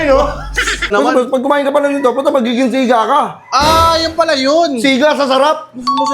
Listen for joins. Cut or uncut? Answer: cut